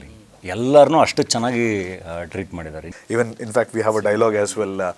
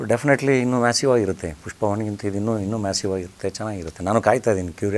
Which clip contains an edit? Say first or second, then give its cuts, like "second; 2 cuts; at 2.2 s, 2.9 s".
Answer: first; 1 cut; at 2.8 s